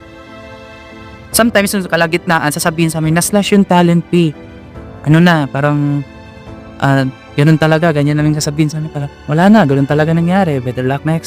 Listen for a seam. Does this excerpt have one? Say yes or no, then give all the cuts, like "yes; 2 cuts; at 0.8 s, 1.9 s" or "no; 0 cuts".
no; 0 cuts